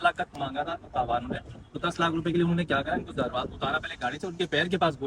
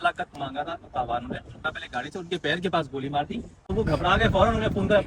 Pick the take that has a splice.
second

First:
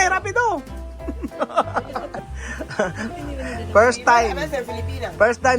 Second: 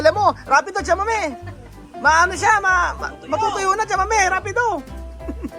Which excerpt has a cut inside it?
first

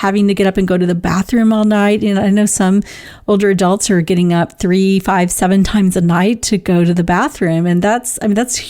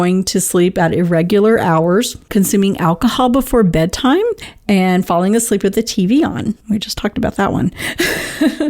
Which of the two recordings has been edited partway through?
second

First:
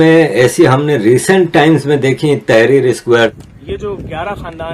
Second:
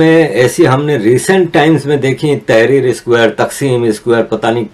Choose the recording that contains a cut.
first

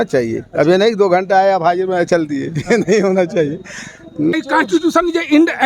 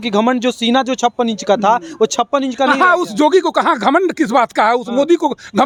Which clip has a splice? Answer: first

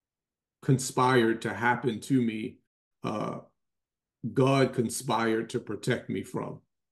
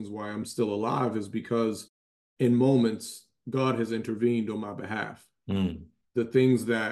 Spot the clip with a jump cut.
second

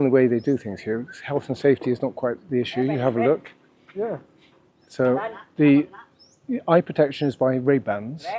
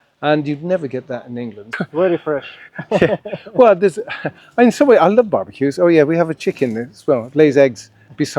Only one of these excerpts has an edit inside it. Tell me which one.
second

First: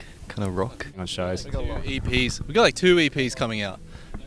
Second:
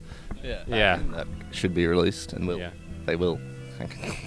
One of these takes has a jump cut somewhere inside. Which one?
first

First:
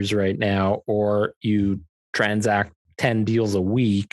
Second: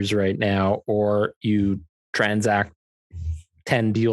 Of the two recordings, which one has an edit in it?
first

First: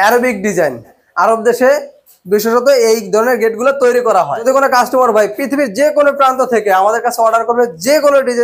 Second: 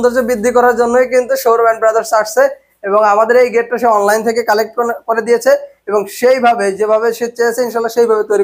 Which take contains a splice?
first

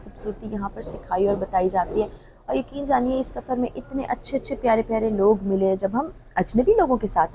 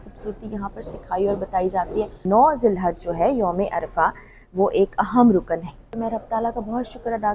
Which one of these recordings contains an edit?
second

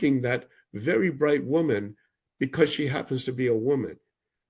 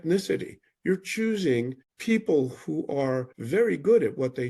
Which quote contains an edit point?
second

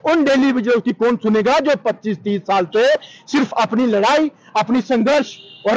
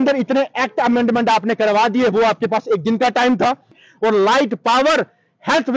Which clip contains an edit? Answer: second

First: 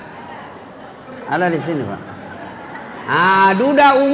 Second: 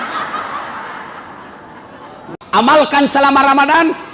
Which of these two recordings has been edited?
second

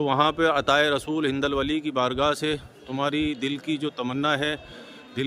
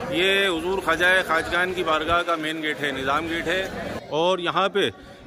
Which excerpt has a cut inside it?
second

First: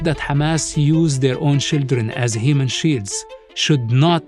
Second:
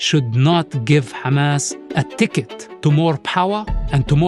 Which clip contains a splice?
second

